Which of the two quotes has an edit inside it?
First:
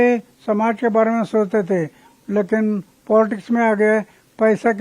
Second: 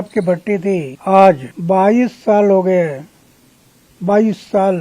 second; 2 cuts; at 0.9 s, 1.5 s

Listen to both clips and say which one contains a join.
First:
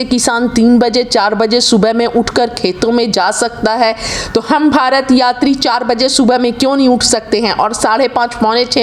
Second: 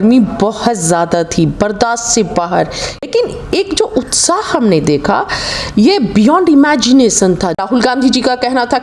second; 2 cuts; at 3.1 s, 7.6 s

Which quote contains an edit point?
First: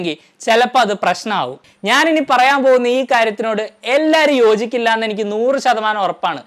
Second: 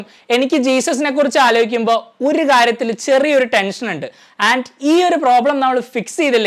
first; 1 cut; at 1.6 s

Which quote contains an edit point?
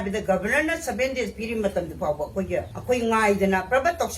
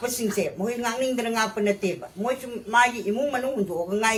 first; 1 cut; at 2.7 s

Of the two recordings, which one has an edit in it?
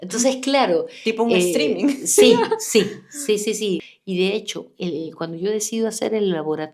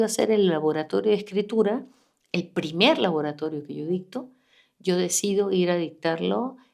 first; 1 cut; at 3.9 s

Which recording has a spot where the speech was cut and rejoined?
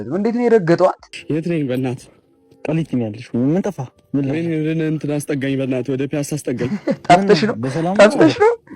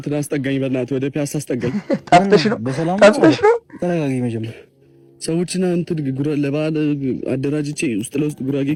first; 1 cut; at 1.1 s

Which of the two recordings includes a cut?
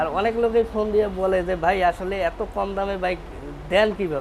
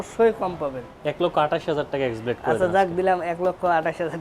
second; 1 cut; at 1.2 s

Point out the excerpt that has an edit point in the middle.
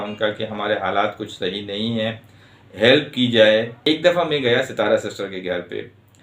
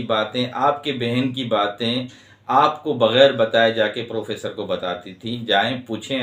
first; 1 cut; at 3.7 s

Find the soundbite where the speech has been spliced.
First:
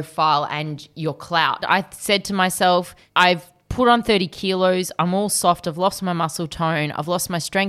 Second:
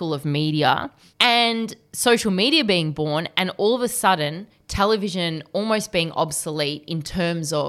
first; 1 cut; at 1.6 s

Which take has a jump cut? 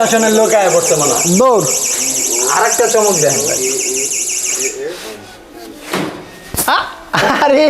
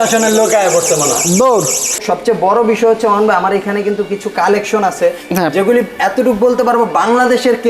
second; 1 cut; at 2.0 s

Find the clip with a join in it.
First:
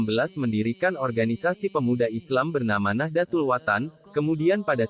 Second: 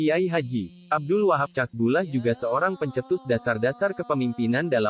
second; 1 cut; at 0.9 s

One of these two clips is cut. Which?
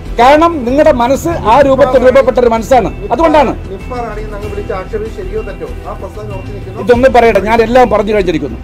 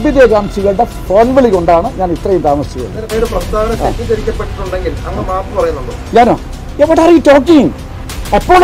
second; 1 cut; at 3.0 s

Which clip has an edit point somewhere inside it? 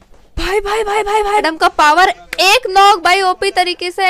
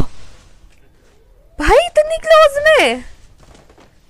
first; 1 cut; at 1.4 s

